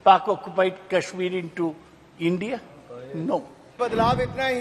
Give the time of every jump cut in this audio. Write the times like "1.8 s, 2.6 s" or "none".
3.6 s